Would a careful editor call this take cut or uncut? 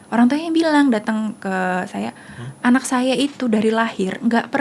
uncut